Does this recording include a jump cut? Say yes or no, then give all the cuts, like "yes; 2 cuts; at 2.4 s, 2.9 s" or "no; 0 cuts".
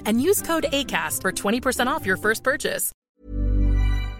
yes; 1 cut; at 2.9 s